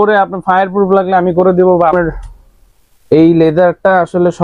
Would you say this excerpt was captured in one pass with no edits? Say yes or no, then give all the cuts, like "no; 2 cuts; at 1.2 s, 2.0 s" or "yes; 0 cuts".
no; 1 cut; at 1.9 s